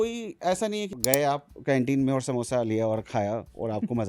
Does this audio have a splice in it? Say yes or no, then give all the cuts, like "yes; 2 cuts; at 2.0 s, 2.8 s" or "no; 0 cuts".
yes; 1 cut; at 0.9 s